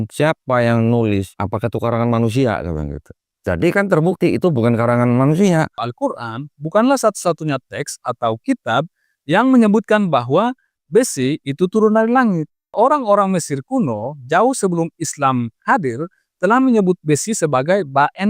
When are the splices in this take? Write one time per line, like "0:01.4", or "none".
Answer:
0:05.8
0:12.7